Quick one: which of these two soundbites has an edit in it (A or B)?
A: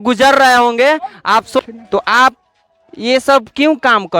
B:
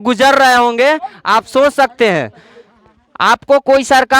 A